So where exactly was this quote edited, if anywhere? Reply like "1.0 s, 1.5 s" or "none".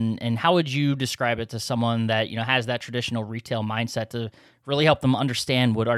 none